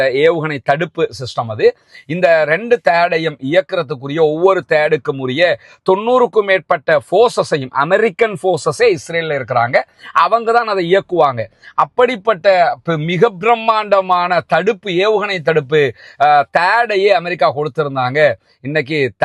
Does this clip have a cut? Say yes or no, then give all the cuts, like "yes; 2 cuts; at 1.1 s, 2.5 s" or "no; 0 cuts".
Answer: no; 0 cuts